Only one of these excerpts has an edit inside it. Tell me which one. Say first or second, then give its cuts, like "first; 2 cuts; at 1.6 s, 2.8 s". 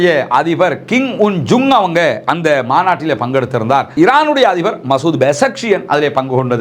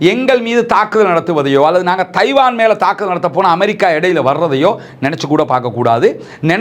first; 1 cut; at 3.9 s